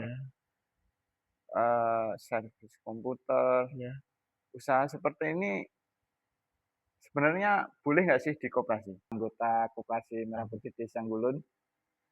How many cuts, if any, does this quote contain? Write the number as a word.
one